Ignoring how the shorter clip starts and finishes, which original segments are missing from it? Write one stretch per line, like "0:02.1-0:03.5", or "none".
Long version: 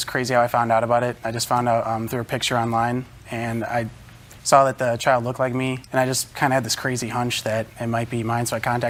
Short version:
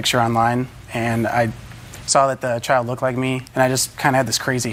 none